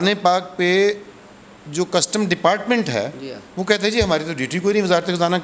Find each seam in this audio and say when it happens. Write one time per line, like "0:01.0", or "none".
none